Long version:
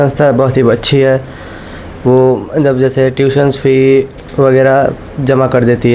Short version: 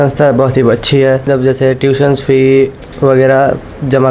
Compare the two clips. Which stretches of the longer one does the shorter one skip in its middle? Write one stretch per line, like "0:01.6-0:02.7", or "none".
0:01.3-0:02.6